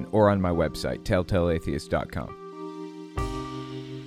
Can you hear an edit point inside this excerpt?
yes; 1 cut; at 2.4 s

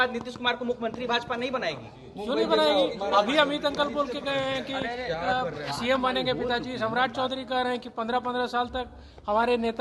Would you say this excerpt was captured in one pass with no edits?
yes; 0 cuts

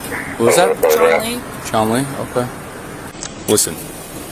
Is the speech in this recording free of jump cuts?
no; 1 cut; at 3.2 s

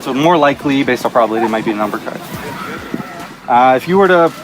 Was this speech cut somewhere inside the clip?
yes; 1 cut; at 2.8 s

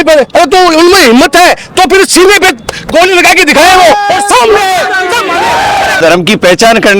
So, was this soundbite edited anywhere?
yes; 1 cut; at 6.0 s

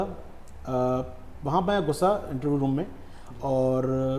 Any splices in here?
no; 0 cuts

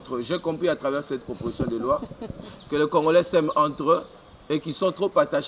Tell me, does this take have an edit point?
no; 0 cuts

